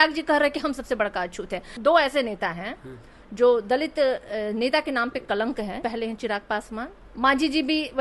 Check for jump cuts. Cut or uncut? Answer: cut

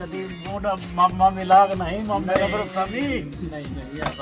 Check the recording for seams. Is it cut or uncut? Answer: uncut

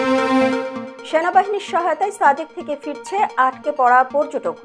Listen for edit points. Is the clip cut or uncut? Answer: uncut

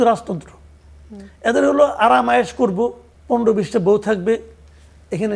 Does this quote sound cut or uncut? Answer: cut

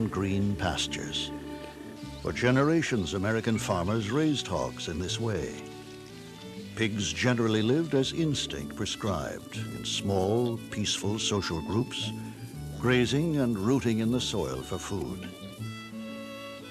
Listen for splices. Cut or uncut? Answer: uncut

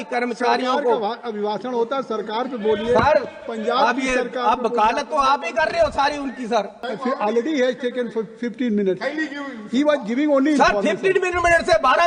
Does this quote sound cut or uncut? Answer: cut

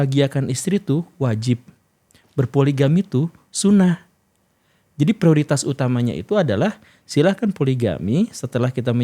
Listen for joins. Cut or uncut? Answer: uncut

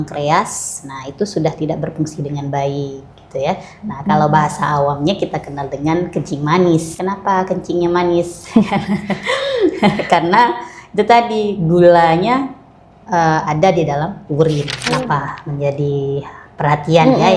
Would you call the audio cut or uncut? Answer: cut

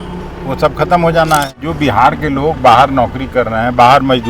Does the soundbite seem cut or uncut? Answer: cut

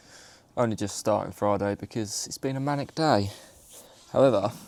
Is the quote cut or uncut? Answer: uncut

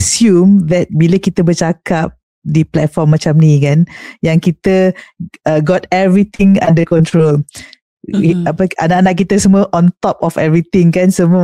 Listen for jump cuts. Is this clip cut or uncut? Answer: uncut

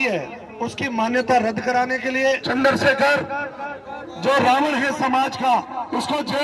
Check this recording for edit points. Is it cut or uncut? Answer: cut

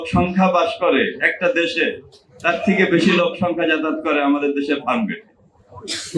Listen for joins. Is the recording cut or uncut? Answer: uncut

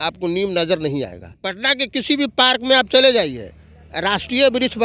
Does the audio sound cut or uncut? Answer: cut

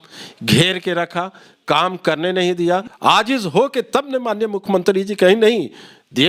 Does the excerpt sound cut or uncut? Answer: cut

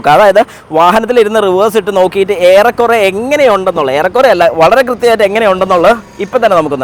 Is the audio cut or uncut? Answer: uncut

